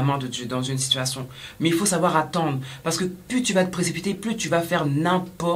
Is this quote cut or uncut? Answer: uncut